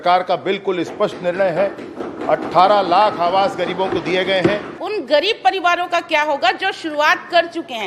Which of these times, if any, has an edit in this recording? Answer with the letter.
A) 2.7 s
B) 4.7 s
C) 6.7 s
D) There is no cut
B